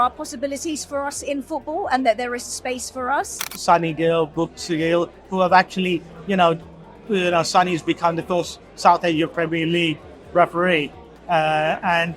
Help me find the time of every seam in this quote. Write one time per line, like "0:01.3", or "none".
0:03.5